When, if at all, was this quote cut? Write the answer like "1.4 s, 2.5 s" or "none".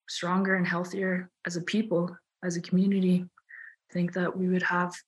3.9 s